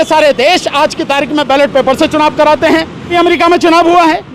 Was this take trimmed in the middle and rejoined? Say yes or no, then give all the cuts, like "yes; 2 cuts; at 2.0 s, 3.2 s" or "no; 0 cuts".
yes; 1 cut; at 3.1 s